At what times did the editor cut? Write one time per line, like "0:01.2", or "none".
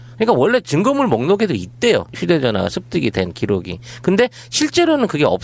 0:00.9